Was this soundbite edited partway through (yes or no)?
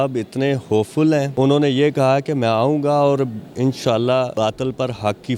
yes